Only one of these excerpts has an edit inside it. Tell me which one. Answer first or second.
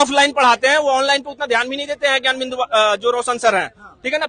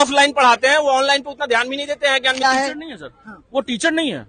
second